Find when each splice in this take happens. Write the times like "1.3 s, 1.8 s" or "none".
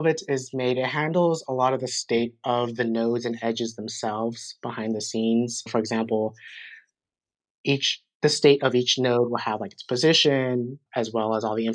5.7 s, 10.8 s